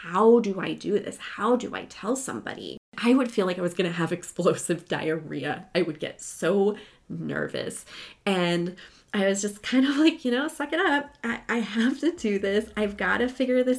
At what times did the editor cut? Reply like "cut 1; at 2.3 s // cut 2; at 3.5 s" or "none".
cut 1; at 2.9 s